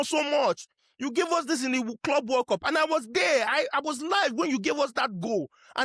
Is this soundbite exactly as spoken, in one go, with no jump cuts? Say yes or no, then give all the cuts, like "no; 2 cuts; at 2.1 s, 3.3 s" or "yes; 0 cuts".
yes; 0 cuts